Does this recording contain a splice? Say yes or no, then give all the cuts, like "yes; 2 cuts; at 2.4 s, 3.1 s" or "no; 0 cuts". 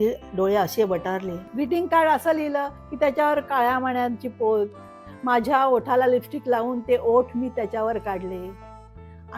yes; 1 cut; at 1.4 s